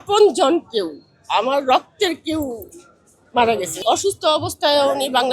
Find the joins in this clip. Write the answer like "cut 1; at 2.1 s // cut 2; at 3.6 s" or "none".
cut 1; at 3.8 s